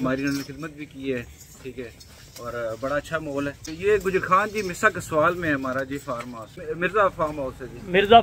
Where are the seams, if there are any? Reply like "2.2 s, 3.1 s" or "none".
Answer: 3.7 s, 6.6 s